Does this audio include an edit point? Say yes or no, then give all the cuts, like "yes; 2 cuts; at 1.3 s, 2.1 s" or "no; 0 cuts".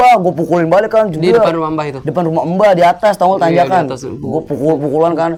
no; 0 cuts